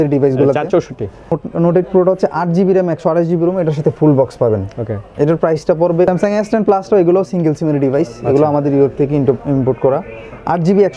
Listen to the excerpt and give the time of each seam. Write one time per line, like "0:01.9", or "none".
0:01.3
0:06.1